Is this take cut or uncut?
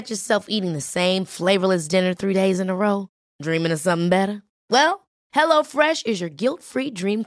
uncut